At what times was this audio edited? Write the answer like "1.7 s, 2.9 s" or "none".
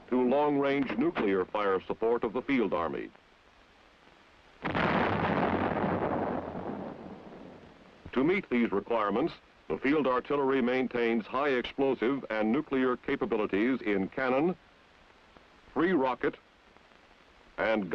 8.1 s